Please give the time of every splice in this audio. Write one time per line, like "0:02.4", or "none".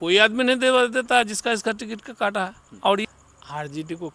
0:03.0